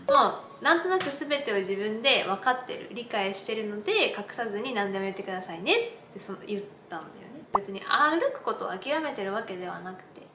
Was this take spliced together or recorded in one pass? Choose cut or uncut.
cut